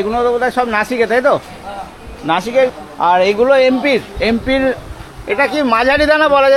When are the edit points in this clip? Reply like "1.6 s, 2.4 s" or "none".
2.7 s